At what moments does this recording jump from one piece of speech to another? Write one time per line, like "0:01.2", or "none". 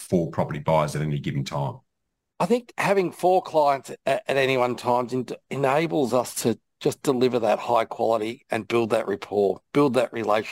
0:02.3